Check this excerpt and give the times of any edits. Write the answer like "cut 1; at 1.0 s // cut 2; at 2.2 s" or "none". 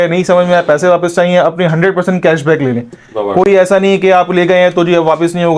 none